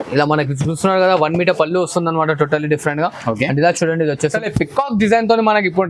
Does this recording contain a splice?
yes; 1 cut; at 4.3 s

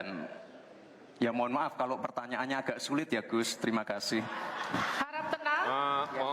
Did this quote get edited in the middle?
yes; 1 cut; at 1.7 s

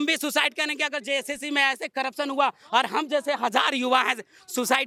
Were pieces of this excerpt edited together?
no; 0 cuts

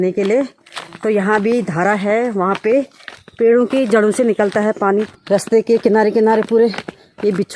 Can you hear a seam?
yes; 1 cut; at 5.1 s

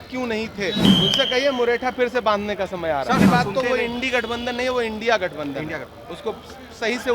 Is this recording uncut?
no; 2 cuts; at 0.8 s, 3.2 s

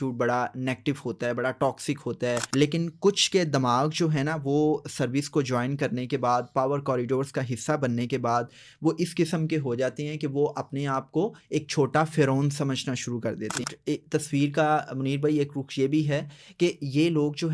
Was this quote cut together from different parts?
yes; 2 cuts; at 2.4 s, 13.6 s

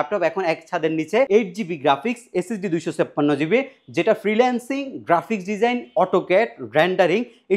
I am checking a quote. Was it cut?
yes; 1 cut; at 1.3 s

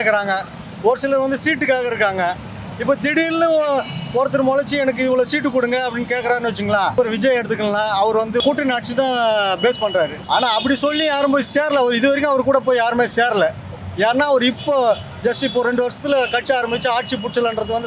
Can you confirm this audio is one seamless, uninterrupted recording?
no; 3 cuts; at 6.9 s, 8.4 s, 10.2 s

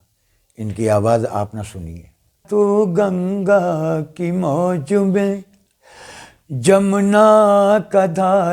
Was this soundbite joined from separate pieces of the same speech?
yes; 1 cut; at 2.4 s

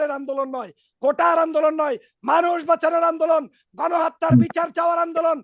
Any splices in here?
no; 0 cuts

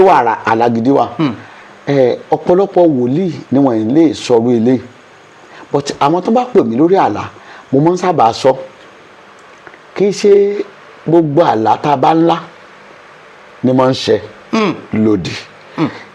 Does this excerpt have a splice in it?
no; 0 cuts

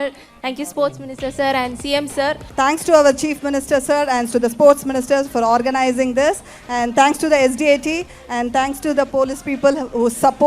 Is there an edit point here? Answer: yes; 1 cut; at 2.4 s

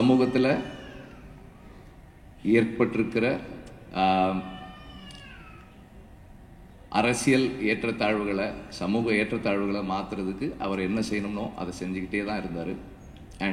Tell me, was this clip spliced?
no; 0 cuts

